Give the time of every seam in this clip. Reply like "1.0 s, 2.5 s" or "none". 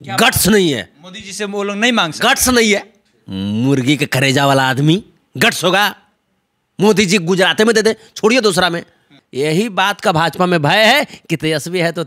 9.2 s